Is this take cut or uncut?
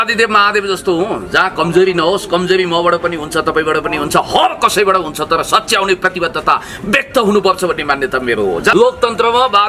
cut